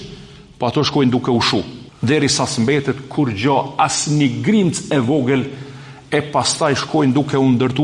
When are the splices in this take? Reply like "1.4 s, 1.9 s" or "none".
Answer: 1.8 s